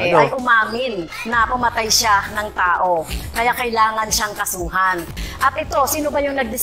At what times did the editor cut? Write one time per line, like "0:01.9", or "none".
0:05.1